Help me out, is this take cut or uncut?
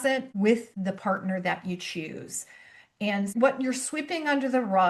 cut